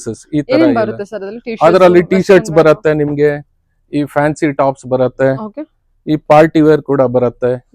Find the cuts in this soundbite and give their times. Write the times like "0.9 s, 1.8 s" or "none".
none